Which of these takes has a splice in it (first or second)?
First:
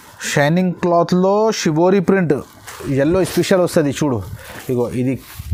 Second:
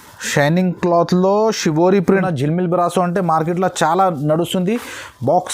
second